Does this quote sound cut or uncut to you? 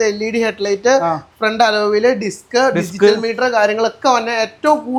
uncut